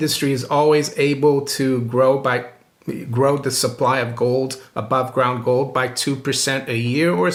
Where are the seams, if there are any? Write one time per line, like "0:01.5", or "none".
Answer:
none

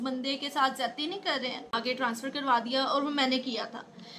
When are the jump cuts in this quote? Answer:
0:01.8

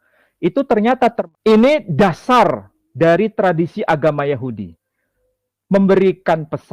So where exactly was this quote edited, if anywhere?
0:01.2

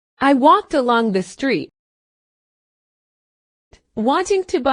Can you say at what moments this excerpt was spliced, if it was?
none

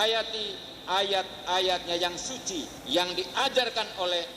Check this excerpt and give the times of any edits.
0:02.8

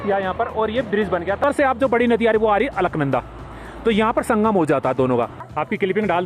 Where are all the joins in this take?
0:01.4
0:05.4

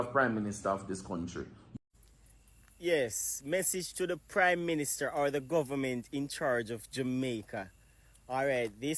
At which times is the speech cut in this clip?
0:01.7

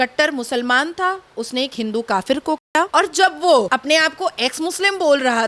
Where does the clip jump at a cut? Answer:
none

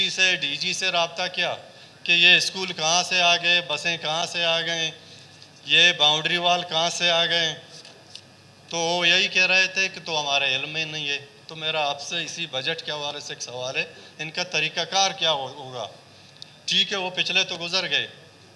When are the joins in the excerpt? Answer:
none

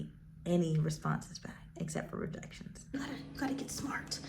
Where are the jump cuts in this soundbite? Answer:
0:02.9

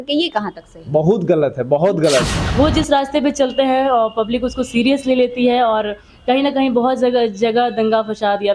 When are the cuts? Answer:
0:02.4

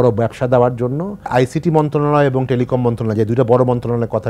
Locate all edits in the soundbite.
0:01.3

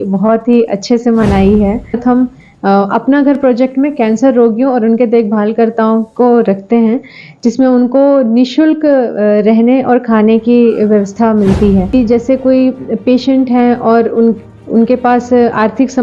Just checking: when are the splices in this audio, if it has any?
0:02.0
0:11.9

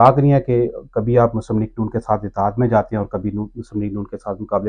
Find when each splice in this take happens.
none

